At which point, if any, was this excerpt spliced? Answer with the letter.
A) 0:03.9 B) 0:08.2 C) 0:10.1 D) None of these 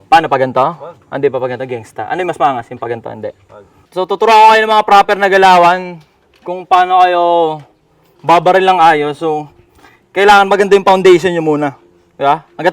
A